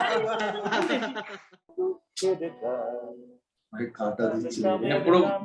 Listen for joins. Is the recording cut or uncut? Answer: cut